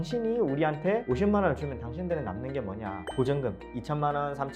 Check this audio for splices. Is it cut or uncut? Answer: cut